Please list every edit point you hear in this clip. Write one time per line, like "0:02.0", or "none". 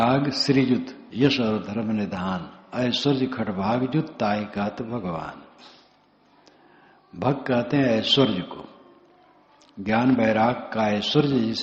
0:01.0